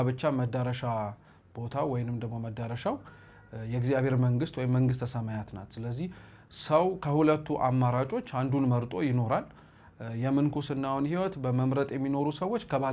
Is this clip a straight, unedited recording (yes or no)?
yes